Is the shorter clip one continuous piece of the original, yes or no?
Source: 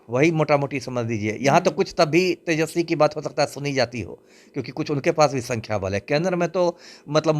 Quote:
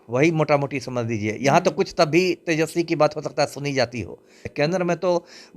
no